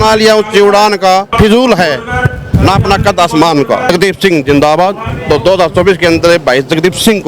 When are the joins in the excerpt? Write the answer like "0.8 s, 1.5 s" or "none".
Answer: 1.3 s, 3.9 s, 5.1 s